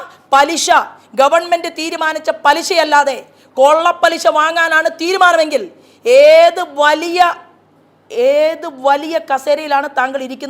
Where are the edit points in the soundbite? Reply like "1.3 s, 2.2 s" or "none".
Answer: none